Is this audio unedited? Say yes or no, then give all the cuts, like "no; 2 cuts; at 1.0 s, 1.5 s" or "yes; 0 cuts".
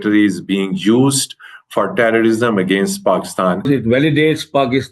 no; 1 cut; at 3.7 s